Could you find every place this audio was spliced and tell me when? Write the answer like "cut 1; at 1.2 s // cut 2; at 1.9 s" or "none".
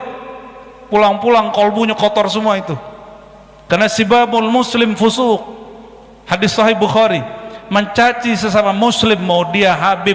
none